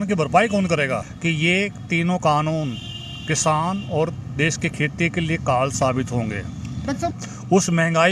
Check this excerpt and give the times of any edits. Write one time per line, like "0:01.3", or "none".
0:01.1
0:07.2